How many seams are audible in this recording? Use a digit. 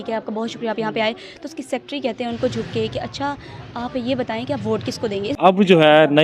1